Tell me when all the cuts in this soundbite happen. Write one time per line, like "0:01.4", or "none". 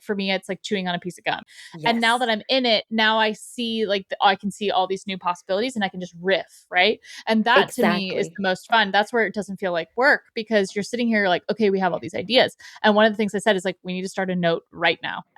0:01.5